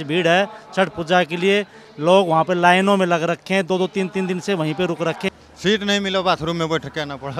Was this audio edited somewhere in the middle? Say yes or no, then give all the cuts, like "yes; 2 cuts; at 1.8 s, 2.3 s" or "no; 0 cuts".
yes; 1 cut; at 5.2 s